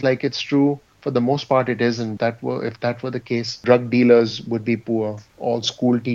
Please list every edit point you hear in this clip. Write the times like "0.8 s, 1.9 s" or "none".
0.9 s, 2.1 s, 3.6 s, 5.3 s